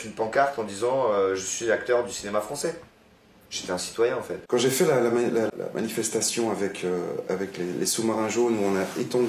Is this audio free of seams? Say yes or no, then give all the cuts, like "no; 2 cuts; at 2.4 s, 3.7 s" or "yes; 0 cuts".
no; 2 cuts; at 4.4 s, 5.5 s